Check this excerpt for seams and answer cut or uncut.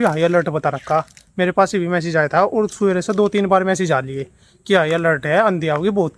uncut